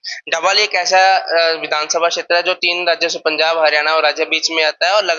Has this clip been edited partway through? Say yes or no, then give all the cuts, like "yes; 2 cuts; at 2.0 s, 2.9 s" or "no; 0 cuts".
no; 0 cuts